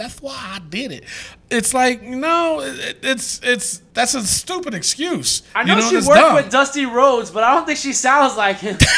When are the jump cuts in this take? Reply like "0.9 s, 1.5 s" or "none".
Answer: 3.8 s, 5.4 s